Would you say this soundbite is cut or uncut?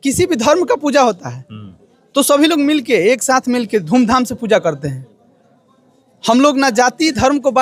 uncut